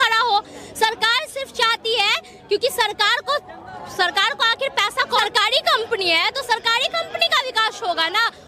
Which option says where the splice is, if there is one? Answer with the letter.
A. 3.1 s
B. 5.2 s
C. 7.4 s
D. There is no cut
B